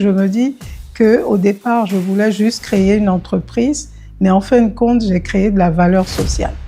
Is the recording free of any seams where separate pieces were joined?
yes; 0 cuts

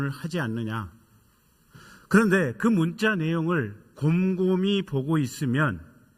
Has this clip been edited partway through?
no; 0 cuts

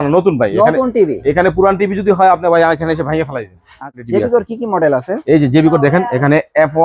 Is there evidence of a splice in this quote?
no; 0 cuts

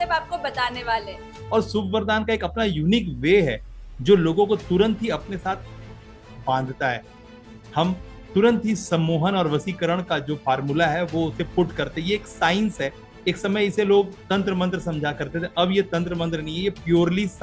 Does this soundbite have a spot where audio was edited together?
yes; 1 cut; at 1.3 s

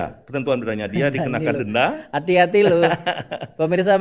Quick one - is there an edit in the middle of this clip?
no; 0 cuts

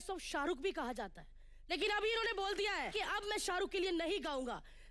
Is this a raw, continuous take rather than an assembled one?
no; 2 cuts; at 1.4 s, 2.9 s

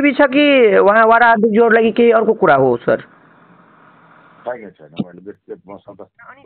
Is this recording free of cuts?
yes; 0 cuts

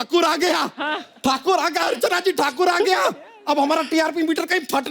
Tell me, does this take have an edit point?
yes; 1 cut; at 1.0 s

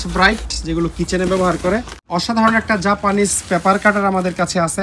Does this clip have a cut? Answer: yes; 1 cut; at 2.0 s

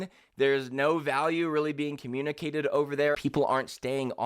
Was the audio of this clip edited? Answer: yes; 1 cut; at 3.2 s

